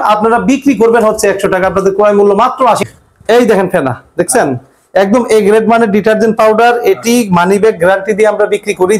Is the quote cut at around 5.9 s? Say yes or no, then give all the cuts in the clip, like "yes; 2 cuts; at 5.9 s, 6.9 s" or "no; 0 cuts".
no; 1 cut; at 2.8 s